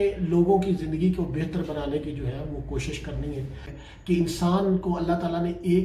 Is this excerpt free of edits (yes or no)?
no